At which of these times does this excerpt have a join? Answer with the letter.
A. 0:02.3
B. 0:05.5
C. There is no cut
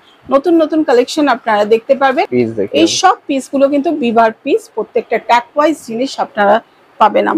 A